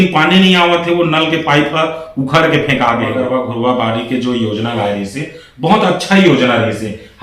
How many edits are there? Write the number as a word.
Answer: one